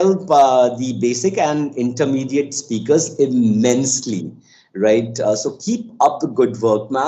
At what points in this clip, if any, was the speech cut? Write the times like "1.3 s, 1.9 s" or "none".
none